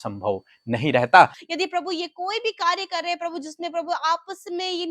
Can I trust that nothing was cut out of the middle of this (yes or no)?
no